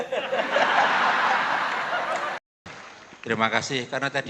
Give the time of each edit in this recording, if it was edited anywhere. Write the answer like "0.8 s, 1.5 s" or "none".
2.5 s